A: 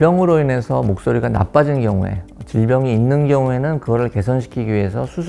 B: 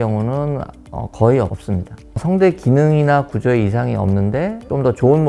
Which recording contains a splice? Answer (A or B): B